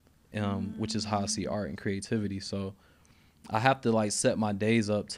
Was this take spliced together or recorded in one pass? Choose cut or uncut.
uncut